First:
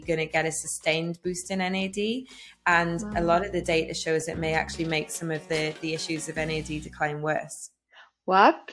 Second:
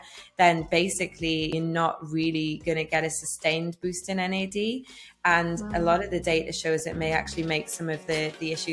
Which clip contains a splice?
second; 1 cut; at 1.5 s

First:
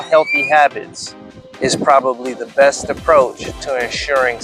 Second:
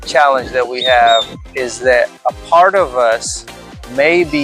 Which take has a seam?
second; 1 cut; at 1.4 s

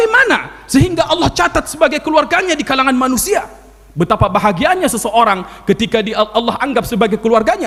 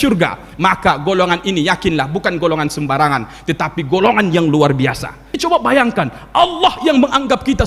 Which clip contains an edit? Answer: second; 1 cut; at 5.4 s

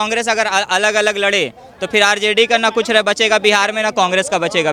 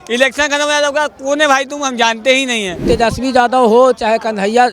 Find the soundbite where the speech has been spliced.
second; 1 cut; at 2.8 s

